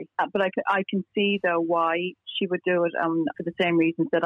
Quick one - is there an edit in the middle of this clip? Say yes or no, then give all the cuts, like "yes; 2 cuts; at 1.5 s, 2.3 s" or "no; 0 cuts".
yes; 1 cut; at 3.3 s